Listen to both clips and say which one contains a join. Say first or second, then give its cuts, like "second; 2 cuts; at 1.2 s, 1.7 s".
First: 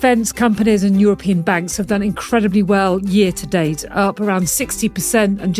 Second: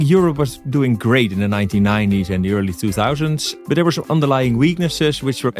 second; 1 cut; at 3.5 s